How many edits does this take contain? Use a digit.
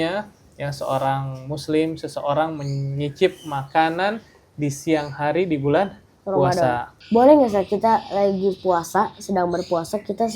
1